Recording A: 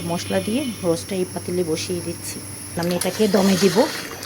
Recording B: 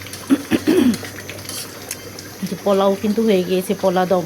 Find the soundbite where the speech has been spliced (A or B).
A